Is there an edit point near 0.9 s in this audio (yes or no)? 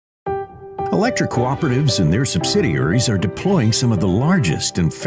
yes